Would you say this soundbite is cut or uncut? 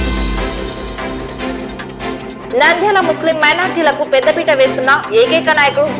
cut